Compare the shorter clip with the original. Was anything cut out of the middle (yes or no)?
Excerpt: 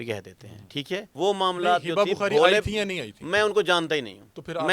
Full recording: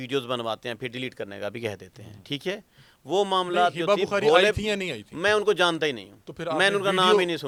yes